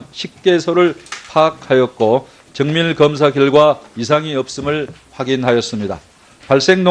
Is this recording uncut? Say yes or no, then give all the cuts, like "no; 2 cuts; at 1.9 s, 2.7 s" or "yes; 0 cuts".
yes; 0 cuts